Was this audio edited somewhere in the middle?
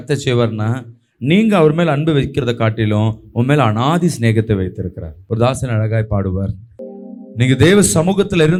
no; 0 cuts

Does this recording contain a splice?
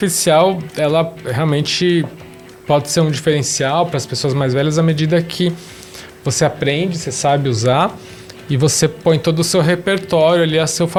no; 0 cuts

